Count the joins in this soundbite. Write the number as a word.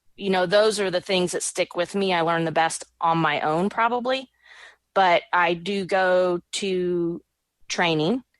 zero